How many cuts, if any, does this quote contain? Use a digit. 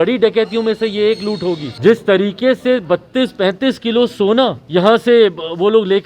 2